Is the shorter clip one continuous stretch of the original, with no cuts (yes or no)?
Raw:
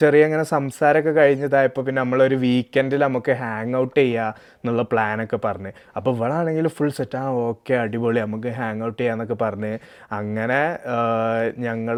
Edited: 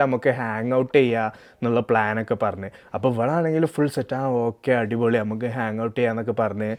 yes